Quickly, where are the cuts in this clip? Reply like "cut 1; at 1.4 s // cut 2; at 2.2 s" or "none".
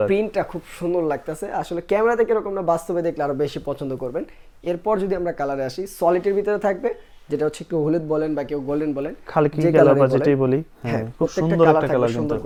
none